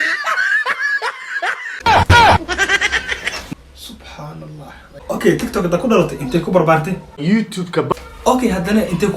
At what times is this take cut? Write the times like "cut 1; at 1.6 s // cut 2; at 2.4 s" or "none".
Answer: cut 1; at 1.7 s // cut 2; at 4.9 s